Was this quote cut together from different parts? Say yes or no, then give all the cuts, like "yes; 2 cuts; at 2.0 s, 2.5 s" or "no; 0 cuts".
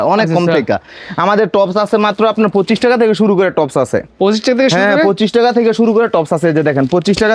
no; 0 cuts